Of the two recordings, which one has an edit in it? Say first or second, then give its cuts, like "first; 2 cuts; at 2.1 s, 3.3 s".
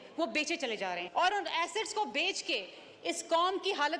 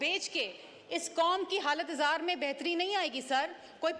first; 1 cut; at 1.0 s